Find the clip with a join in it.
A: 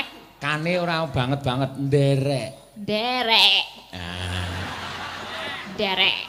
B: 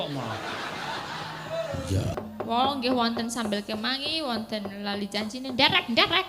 B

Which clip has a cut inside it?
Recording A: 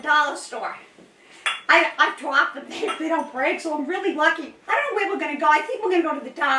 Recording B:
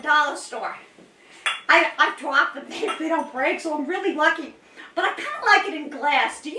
A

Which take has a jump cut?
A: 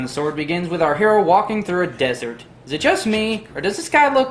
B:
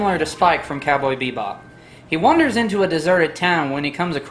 B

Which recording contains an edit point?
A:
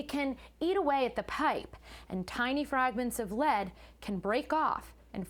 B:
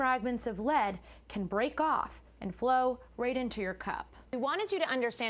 B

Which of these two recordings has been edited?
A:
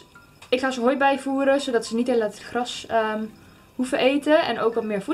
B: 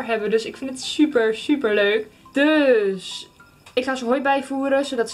B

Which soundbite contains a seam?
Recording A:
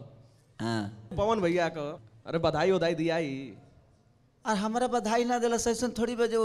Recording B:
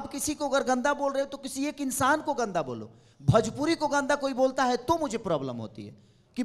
A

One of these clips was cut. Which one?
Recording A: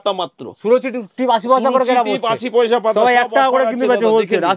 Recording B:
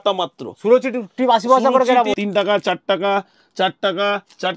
B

